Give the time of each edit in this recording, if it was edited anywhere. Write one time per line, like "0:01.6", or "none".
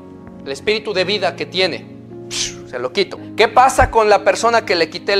0:03.3